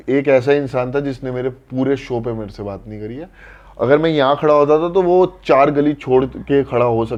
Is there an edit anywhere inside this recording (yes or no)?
no